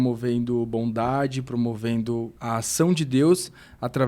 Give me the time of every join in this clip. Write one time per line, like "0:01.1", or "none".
0:02.4